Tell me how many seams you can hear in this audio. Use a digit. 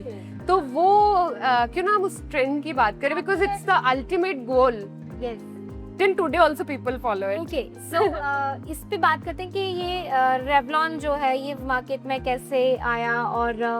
0